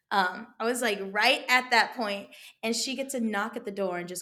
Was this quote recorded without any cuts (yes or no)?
yes